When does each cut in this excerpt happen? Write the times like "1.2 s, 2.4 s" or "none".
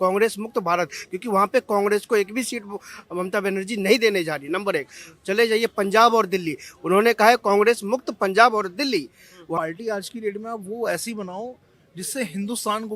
9.5 s